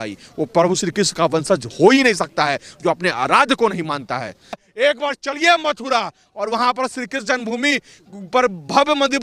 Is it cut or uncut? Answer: cut